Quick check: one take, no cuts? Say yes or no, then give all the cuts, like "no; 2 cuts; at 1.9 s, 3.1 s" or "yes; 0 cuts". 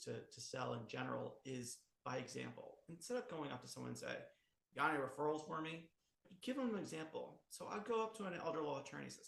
no; 1 cut; at 6.3 s